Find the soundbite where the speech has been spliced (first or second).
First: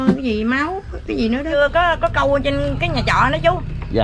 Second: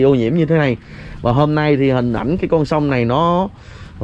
first